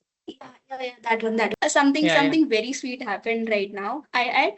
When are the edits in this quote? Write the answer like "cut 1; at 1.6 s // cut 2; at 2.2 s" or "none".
cut 1; at 1.5 s